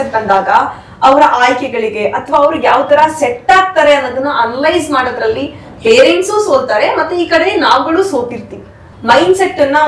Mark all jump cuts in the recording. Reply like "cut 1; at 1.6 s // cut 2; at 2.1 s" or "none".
cut 1; at 8.9 s